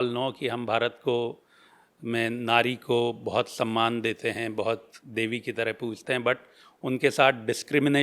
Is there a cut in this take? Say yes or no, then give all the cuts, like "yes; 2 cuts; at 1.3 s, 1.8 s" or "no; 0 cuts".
no; 0 cuts